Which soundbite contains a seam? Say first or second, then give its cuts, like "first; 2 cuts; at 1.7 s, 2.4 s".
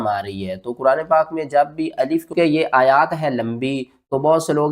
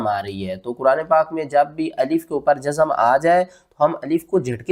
first; 1 cut; at 2.3 s